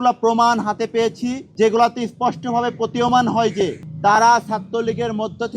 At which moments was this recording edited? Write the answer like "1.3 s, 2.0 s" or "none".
1.4 s, 3.8 s